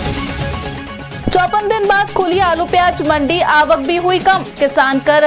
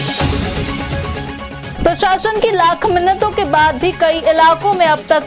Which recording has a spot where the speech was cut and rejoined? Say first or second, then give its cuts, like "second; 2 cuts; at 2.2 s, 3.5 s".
first; 1 cut; at 1.1 s